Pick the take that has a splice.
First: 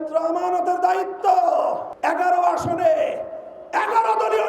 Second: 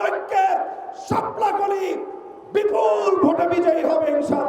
first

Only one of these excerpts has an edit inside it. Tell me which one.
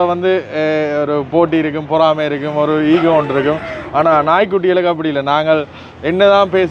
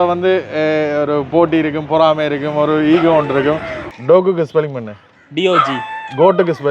second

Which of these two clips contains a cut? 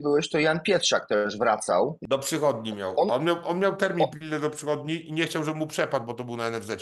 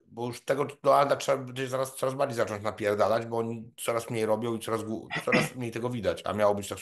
first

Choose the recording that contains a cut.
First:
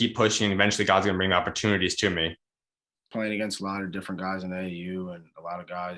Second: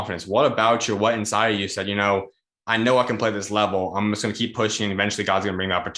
first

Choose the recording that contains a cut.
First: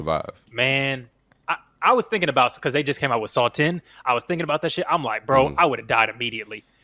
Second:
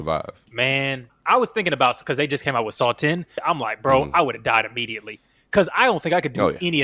second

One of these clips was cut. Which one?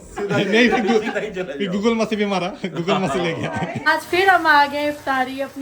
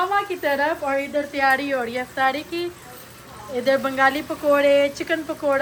first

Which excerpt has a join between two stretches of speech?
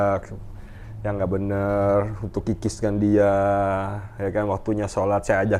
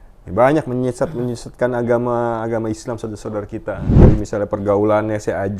second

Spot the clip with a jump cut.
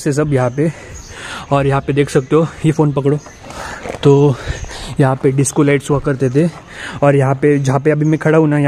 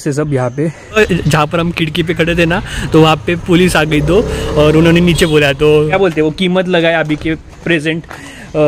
second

